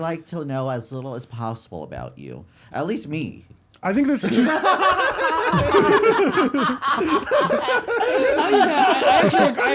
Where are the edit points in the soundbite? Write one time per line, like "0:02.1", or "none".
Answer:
none